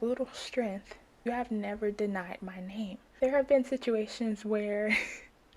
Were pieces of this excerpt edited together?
yes; 2 cuts; at 1.3 s, 3.0 s

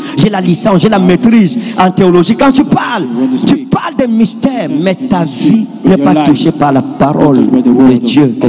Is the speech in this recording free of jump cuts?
yes; 0 cuts

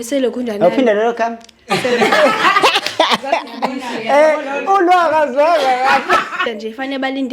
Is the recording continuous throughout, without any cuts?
no; 1 cut; at 6.4 s

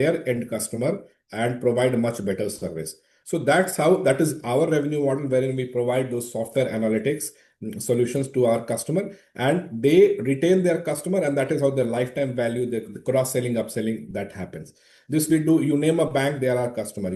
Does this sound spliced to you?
no; 0 cuts

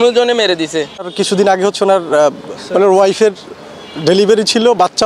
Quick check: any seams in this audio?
yes; 2 cuts; at 1.1 s, 2.5 s

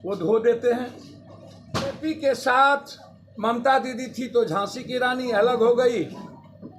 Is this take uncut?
no; 1 cut; at 2.0 s

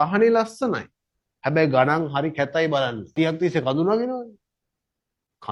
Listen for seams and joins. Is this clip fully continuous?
no; 1 cut; at 3.1 s

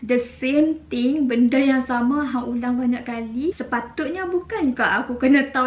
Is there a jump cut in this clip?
yes; 1 cut; at 3.6 s

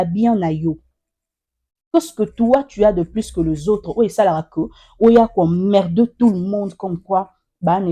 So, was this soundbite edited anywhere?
no; 0 cuts

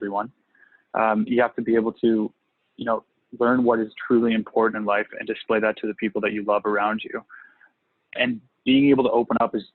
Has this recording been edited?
yes; 1 cut; at 7.6 s

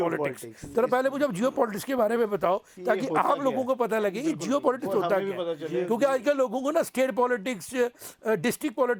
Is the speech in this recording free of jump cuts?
yes; 0 cuts

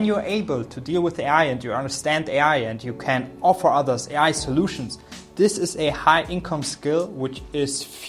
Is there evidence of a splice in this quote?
no; 0 cuts

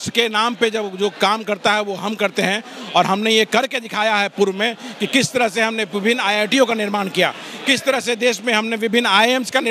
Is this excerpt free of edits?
yes; 0 cuts

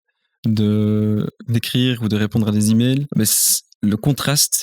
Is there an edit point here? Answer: yes; 1 cut; at 3.1 s

